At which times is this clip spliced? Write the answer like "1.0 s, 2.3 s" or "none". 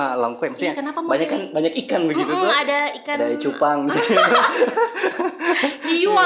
none